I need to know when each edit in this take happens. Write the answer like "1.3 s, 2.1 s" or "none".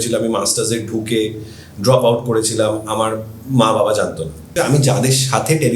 4.5 s